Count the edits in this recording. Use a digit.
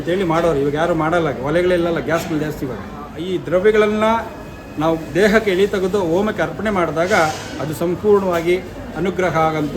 1